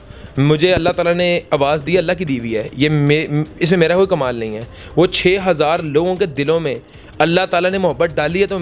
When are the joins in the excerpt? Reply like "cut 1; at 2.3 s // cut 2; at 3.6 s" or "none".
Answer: none